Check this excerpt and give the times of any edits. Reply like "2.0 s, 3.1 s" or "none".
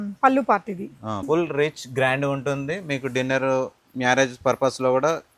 1.2 s